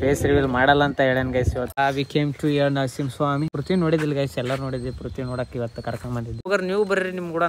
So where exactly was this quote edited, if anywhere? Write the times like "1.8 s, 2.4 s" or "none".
1.8 s, 3.6 s, 6.5 s